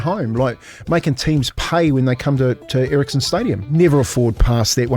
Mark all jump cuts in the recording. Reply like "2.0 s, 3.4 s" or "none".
3.7 s